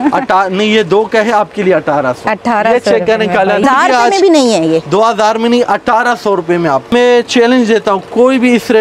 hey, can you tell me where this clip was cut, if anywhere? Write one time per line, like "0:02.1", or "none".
0:03.6
0:06.9